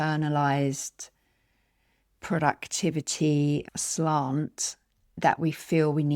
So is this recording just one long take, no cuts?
yes; 0 cuts

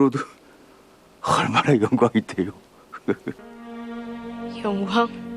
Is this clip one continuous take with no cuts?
no; 1 cut; at 3.4 s

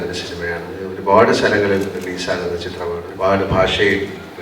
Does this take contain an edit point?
yes; 2 cuts; at 0.9 s, 3.1 s

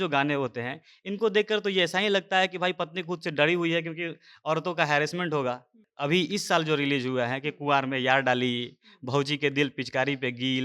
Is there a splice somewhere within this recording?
yes; 1 cut; at 5.9 s

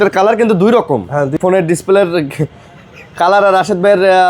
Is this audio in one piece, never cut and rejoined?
no; 1 cut; at 1.3 s

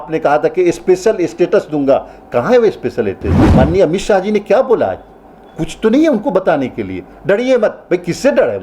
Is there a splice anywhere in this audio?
yes; 1 cut; at 3.3 s

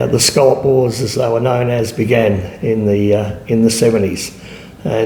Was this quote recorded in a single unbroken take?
yes; 0 cuts

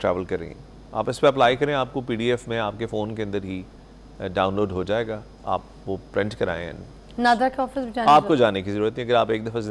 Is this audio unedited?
yes; 0 cuts

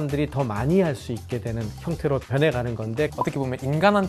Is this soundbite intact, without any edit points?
no; 1 cut; at 3.1 s

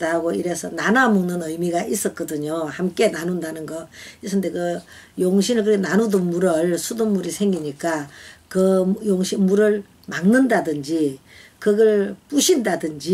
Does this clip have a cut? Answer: no; 0 cuts

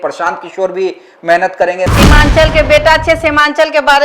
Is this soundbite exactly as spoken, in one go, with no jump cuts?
no; 1 cut; at 1.9 s

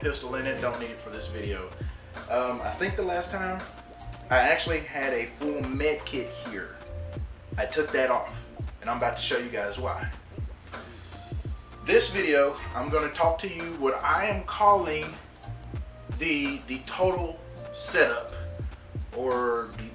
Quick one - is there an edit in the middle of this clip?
no; 0 cuts

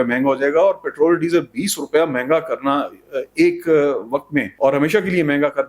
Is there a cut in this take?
yes; 1 cut; at 4.5 s

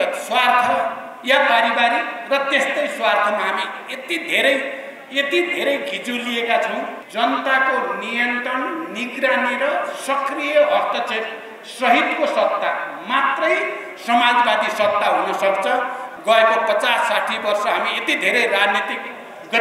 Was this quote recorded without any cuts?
no; 2 cuts; at 7.0 s, 16.1 s

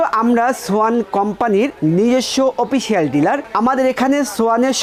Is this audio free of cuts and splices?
yes; 0 cuts

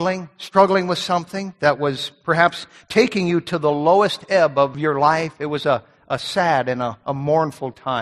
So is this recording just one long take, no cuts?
no; 1 cut; at 4.8 s

